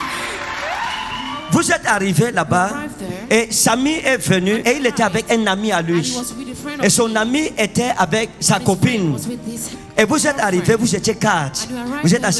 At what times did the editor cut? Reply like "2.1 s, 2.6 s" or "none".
1.2 s, 4.6 s

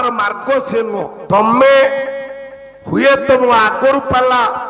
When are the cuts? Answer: 1.2 s

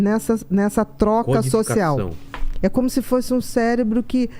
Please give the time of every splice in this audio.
2.2 s

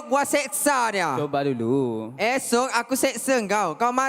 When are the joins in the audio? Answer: none

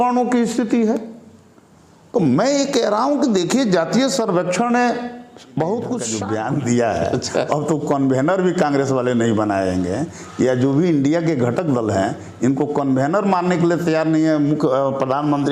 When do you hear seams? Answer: 6.1 s

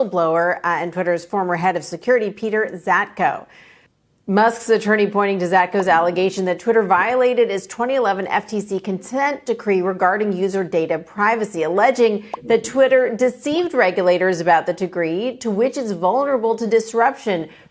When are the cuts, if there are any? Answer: none

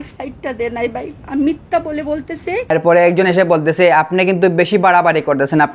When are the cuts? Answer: 2.7 s

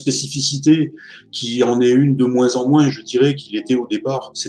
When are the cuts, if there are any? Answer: none

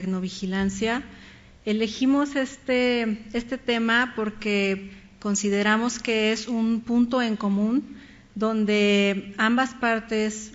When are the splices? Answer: 7.6 s

